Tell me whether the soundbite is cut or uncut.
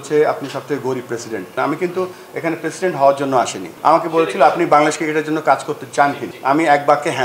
cut